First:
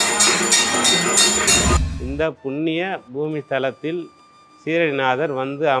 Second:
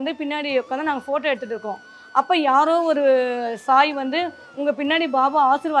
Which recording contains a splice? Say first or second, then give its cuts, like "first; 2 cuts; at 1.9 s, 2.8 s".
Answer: first; 1 cut; at 1.8 s